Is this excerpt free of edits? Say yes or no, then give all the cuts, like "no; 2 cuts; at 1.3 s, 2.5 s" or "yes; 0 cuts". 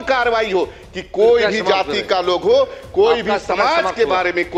yes; 0 cuts